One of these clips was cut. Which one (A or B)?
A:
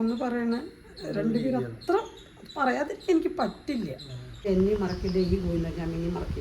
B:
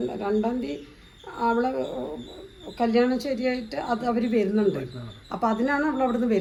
A